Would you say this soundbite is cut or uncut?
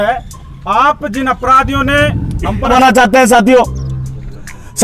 cut